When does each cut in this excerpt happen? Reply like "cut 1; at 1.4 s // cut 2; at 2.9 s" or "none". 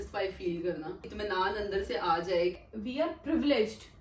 cut 1; at 1.1 s // cut 2; at 2.6 s